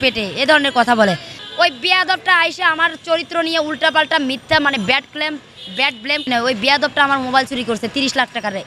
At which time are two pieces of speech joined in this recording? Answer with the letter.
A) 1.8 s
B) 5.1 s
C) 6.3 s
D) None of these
C